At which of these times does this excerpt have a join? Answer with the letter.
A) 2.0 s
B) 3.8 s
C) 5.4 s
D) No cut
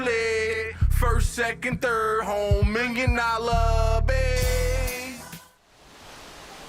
C